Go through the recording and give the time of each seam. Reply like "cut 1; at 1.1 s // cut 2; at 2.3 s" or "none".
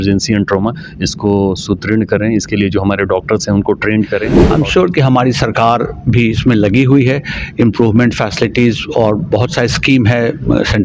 cut 1; at 4.4 s